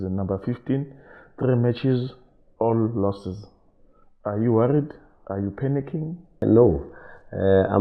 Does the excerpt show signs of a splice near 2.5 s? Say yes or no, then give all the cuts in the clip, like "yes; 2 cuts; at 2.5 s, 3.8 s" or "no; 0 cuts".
no; 1 cut; at 6.4 s